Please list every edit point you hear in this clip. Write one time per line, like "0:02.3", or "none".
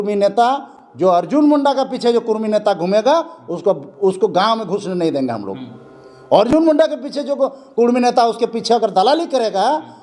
none